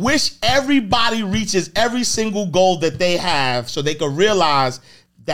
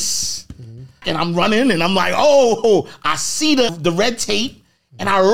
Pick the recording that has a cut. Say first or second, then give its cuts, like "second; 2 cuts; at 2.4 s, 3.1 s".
second; 2 cuts; at 1.0 s, 3.8 s